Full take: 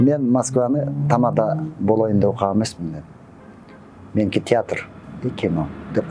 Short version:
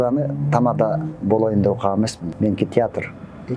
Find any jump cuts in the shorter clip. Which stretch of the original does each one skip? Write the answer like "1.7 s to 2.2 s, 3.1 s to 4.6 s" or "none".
2.8 s to 4.0 s